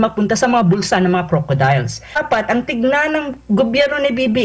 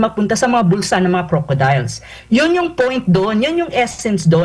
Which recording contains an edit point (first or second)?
first